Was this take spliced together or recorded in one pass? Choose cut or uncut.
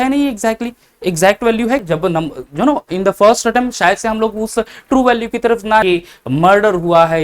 cut